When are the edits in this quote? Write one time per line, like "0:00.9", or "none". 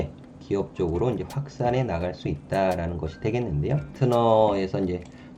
0:03.9